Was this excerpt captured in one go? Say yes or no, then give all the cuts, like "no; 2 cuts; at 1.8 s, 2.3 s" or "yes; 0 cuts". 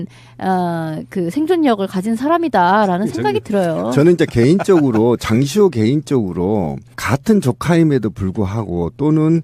yes; 0 cuts